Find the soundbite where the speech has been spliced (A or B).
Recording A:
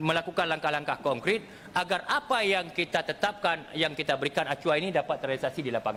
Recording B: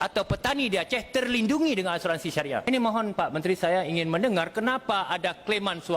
B